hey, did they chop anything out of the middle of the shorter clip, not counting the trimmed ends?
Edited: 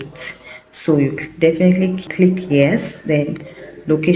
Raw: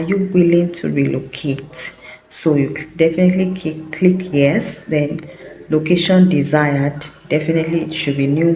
yes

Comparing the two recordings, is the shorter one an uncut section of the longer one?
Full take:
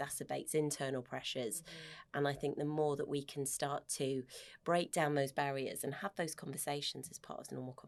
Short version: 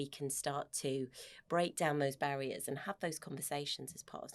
yes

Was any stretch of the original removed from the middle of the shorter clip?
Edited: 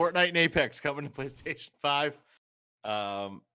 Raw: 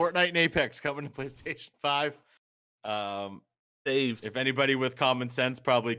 no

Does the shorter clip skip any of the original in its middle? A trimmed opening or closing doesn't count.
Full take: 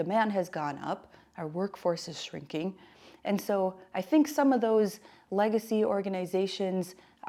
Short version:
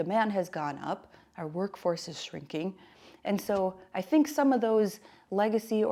no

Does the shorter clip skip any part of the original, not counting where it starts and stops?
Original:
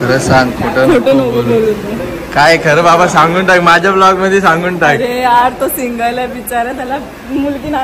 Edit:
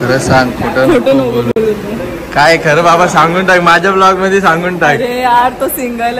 no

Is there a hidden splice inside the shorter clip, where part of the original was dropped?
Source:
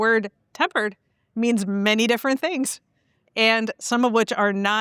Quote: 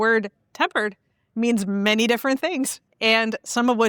yes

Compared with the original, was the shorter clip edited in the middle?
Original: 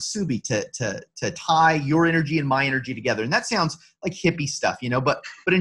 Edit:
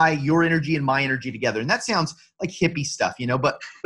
no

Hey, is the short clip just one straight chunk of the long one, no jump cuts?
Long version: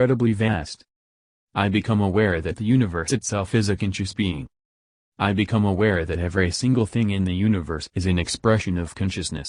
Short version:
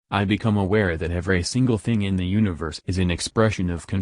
no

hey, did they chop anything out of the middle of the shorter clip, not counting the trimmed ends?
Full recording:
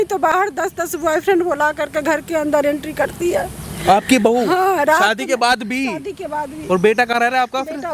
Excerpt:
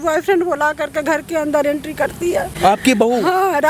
yes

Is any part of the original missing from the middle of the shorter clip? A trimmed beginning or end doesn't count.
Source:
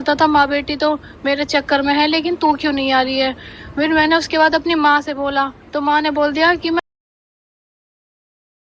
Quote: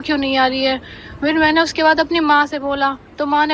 no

